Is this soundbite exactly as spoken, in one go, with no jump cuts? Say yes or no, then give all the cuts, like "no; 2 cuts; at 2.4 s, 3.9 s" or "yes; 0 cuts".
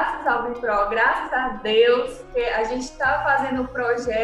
no; 1 cut; at 2.2 s